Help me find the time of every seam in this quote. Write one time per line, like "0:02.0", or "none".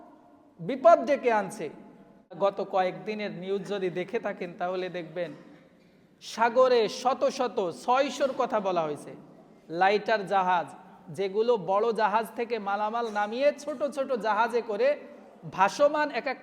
0:02.4